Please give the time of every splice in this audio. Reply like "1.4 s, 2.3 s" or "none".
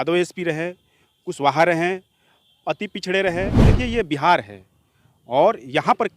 3.6 s